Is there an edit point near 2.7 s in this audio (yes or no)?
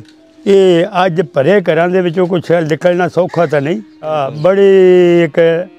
no